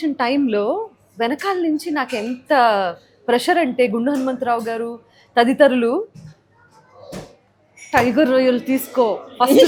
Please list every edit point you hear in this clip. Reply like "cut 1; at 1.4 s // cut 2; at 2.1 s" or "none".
none